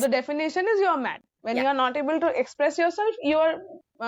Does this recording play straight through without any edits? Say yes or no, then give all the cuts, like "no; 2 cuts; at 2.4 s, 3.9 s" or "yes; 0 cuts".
yes; 0 cuts